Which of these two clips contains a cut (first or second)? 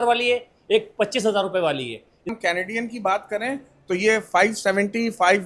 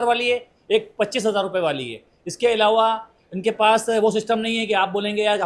first